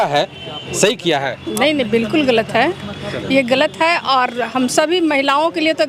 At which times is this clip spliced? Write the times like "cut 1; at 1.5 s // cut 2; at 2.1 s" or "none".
none